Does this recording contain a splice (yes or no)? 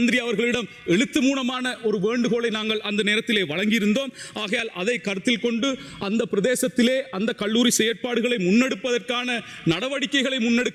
no